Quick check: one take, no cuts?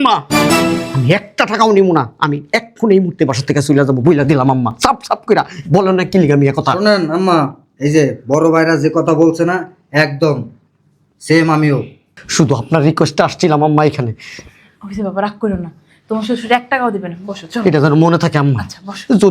yes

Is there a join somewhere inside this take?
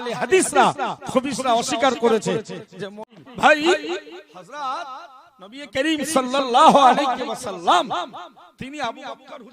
yes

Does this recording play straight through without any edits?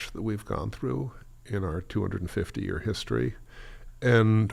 yes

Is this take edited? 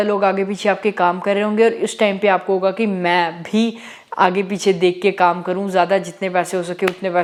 no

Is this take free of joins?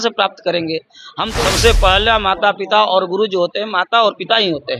no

